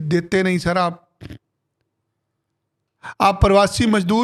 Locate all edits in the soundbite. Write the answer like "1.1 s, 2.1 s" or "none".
none